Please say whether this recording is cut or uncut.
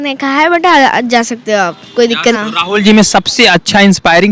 cut